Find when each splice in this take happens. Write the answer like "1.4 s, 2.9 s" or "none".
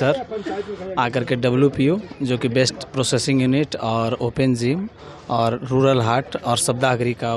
none